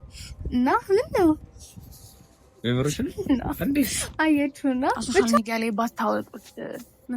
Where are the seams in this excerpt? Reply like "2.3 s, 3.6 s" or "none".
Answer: 5.2 s